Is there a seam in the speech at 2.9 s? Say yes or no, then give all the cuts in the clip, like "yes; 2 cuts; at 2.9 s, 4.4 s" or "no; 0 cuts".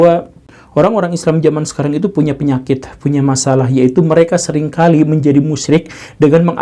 no; 0 cuts